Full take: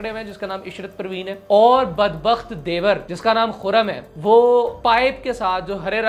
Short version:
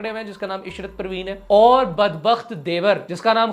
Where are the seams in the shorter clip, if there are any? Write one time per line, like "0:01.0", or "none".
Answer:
none